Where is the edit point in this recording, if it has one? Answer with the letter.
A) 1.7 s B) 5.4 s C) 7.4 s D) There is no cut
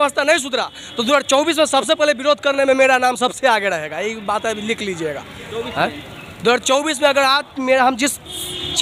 D